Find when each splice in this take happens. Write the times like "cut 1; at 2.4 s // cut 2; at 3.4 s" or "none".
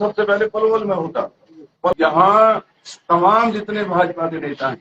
cut 1; at 1.9 s